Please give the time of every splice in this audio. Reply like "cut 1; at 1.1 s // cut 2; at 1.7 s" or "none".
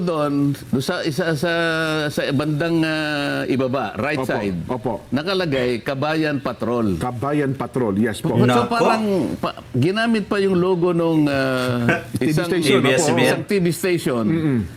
none

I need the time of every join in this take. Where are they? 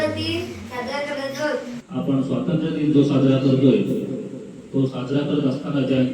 cut 1; at 1.8 s

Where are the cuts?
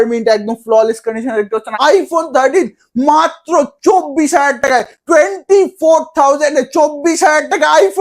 cut 1; at 1.7 s

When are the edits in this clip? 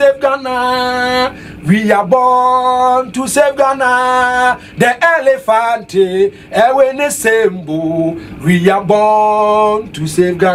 none

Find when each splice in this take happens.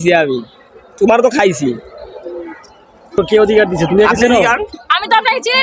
cut 1; at 3.2 s

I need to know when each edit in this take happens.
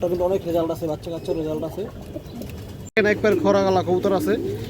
cut 1; at 2.9 s

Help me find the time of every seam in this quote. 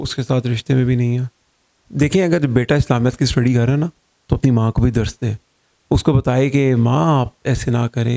cut 1; at 1.7 s

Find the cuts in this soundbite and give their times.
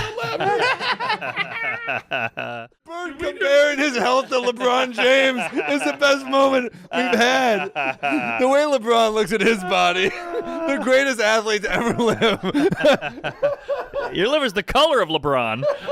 cut 1; at 3.1 s

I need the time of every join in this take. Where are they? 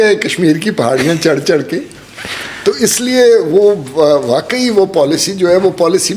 none

